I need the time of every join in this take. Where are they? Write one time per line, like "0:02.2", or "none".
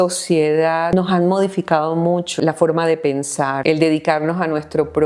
0:00.9
0:02.4
0:03.6